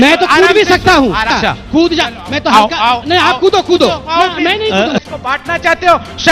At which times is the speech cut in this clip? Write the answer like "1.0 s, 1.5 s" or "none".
1.3 s, 5.1 s